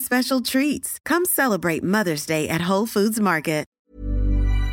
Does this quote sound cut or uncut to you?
cut